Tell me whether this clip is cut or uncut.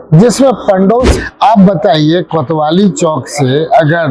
cut